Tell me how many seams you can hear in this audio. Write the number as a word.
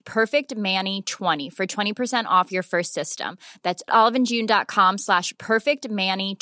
one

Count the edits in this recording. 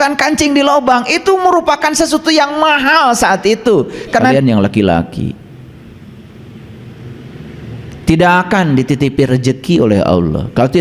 one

